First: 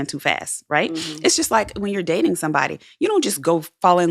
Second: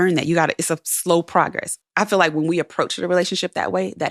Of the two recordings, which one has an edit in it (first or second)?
second